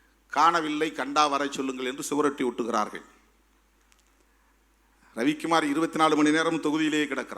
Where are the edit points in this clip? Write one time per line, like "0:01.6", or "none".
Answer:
none